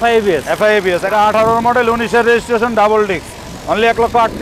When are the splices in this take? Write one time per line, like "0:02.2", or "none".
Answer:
0:01.0